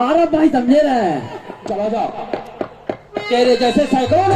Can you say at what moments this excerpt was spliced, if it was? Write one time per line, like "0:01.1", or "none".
0:01.5